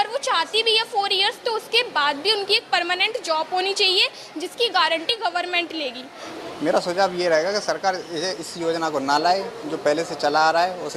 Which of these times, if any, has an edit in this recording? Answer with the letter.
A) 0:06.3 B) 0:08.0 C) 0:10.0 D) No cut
A